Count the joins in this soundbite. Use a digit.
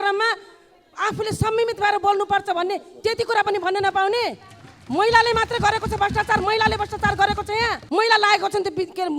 1